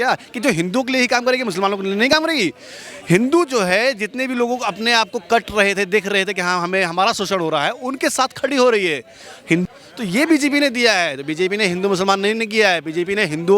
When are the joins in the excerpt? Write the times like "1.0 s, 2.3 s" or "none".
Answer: 9.6 s